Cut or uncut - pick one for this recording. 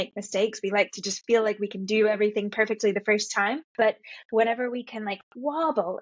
cut